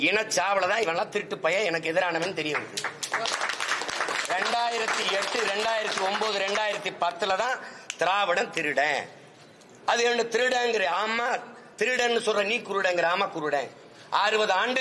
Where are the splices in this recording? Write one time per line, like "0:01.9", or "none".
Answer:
none